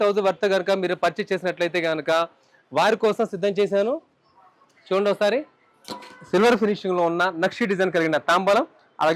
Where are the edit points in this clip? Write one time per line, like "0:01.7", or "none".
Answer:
none